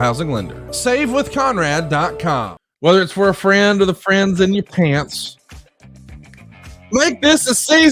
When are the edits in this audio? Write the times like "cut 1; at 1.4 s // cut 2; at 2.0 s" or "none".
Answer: cut 1; at 2.6 s